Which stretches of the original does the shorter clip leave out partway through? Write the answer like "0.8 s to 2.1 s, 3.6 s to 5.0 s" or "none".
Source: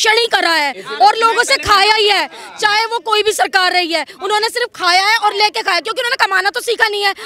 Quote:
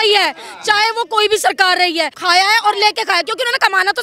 4.1 s to 4.7 s